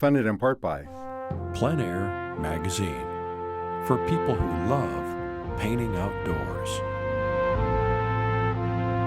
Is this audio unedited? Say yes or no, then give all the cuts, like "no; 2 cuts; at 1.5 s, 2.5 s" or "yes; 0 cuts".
no; 1 cut; at 0.9 s